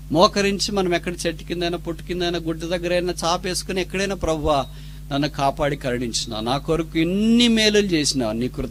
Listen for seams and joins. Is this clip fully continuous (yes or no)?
yes